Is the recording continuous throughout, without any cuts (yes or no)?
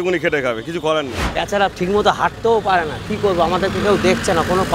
no